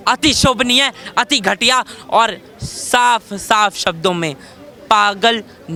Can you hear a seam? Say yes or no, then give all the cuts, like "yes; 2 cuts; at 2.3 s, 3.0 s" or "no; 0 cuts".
no; 0 cuts